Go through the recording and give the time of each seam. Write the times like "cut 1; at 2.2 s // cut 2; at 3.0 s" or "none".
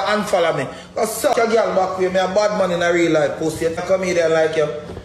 cut 1; at 1.3 s // cut 2; at 3.8 s